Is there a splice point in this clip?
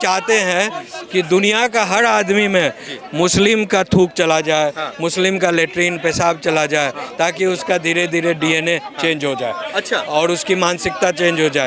no; 0 cuts

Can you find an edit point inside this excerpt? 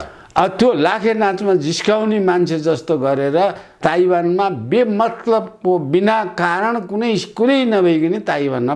yes; 1 cut; at 3.7 s

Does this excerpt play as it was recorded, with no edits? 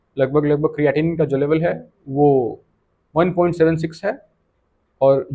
yes; 0 cuts

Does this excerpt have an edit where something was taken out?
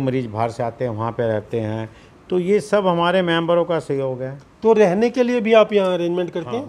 no; 0 cuts

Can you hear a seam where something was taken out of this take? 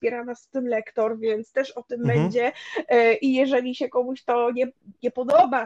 no; 0 cuts

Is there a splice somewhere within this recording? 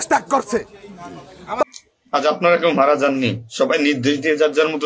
yes; 1 cut; at 1.6 s

